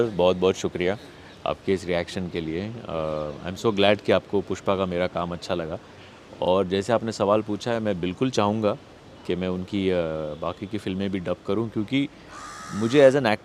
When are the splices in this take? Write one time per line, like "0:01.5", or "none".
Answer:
none